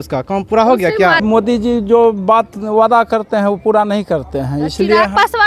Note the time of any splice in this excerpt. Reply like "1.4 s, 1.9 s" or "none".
1.2 s